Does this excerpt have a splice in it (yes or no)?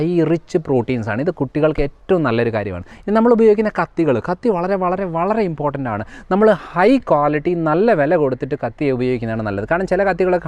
yes